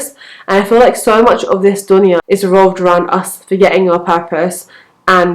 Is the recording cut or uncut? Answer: cut